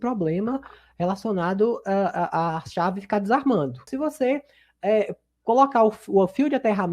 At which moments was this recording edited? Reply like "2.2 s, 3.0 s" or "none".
3.9 s